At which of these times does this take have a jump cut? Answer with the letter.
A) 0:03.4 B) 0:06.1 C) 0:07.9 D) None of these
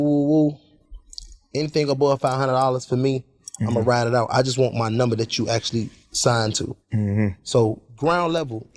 C